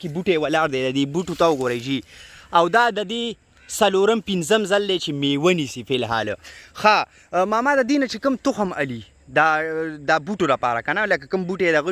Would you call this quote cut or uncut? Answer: uncut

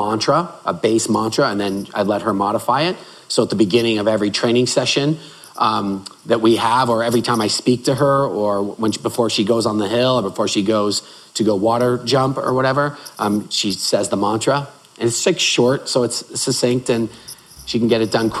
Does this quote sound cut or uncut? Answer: uncut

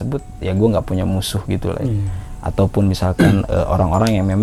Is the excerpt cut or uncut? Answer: uncut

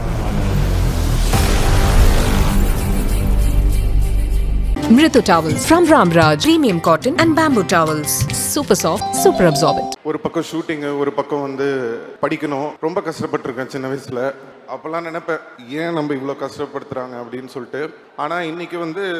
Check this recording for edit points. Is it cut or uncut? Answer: cut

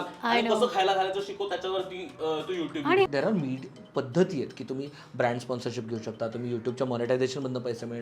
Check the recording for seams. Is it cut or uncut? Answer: cut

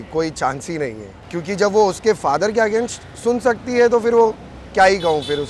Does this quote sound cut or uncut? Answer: cut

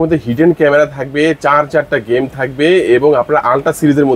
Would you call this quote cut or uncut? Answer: uncut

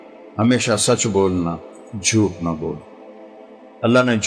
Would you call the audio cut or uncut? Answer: uncut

